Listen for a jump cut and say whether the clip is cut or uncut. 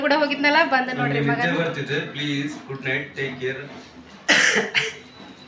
uncut